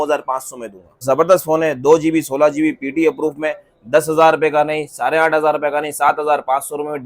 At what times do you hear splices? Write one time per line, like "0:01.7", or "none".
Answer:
0:01.0